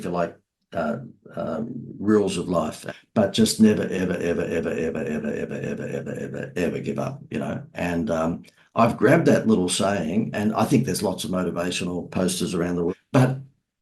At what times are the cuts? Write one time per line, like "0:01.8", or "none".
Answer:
0:02.8
0:12.9

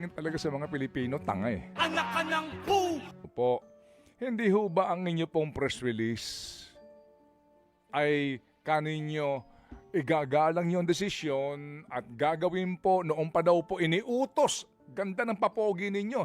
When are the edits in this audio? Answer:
0:03.2

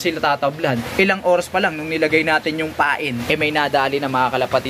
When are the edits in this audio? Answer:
0:00.9
0:03.2

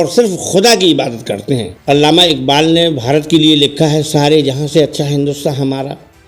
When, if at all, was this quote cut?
0:01.7

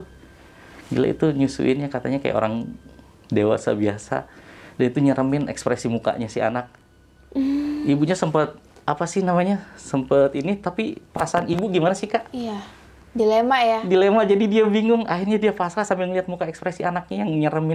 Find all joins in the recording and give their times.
none

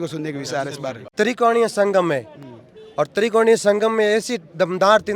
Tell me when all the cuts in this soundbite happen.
0:01.0

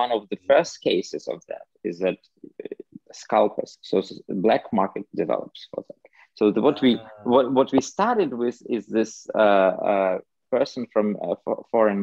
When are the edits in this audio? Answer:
none

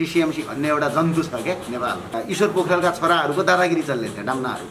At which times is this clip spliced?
0:02.1

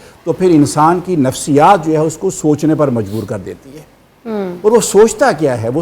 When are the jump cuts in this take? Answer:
none

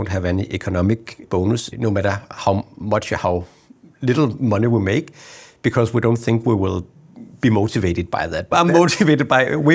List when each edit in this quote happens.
0:01.3
0:08.5

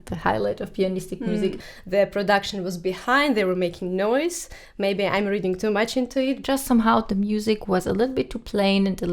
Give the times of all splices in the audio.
0:01.7
0:06.4

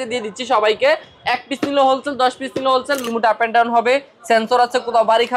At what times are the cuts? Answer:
0:03.1

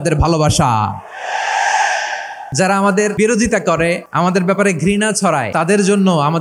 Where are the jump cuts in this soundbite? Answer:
0:02.4
0:03.1
0:04.1
0:05.5

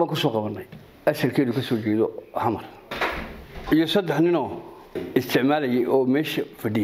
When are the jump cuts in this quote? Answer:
0:02.9
0:05.0

